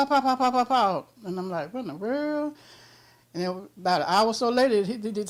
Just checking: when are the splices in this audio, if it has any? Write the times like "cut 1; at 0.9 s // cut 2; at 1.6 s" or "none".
none